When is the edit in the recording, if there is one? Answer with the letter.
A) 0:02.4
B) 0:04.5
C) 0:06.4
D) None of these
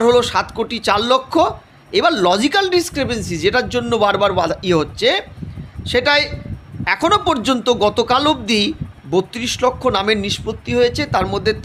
D